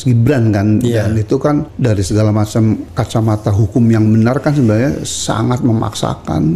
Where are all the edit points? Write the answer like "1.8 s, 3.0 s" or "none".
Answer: 1.7 s, 2.9 s